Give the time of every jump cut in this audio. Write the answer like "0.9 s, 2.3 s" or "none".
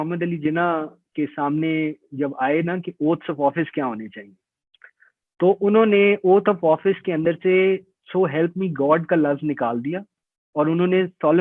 none